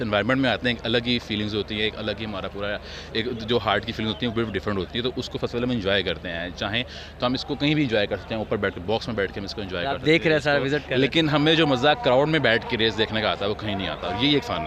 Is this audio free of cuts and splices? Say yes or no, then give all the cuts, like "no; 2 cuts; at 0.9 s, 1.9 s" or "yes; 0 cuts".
yes; 0 cuts